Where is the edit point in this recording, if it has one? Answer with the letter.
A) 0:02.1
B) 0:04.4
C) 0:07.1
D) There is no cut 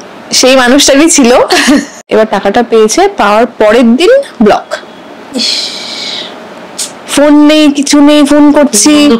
A